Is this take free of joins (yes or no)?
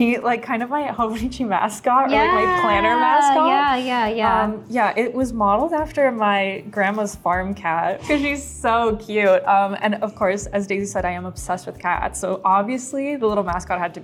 yes